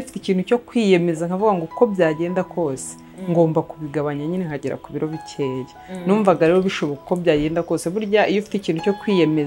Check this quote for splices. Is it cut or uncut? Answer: uncut